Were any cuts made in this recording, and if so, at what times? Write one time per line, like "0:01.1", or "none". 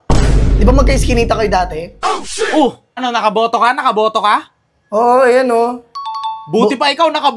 0:02.9